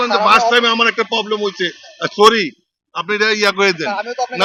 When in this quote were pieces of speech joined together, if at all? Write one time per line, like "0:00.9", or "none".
none